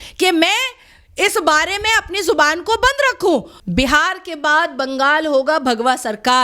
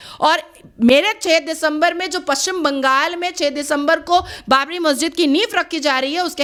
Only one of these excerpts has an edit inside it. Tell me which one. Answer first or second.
first